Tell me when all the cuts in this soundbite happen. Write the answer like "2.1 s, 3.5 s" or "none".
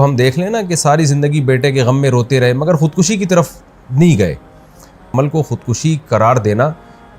5.1 s